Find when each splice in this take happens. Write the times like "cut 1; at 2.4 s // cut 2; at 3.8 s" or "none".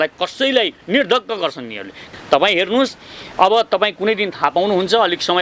cut 1; at 1.9 s